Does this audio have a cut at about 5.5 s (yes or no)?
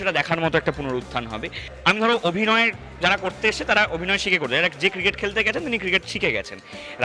no